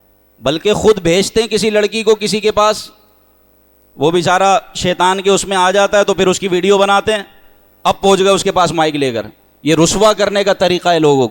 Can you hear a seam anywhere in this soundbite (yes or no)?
no